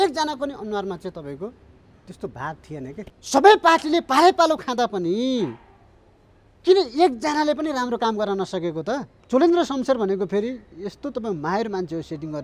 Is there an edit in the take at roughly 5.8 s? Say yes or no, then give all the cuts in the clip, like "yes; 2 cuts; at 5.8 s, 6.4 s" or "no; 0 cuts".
no; 2 cuts; at 3.1 s, 9.1 s